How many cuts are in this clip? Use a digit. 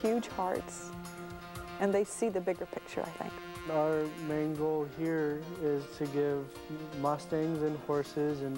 1